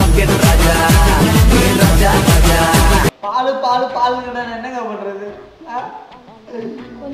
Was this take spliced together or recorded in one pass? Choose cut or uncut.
cut